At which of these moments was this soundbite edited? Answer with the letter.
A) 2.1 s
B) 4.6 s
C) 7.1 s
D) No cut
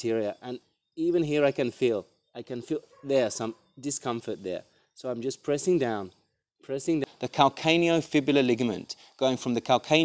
C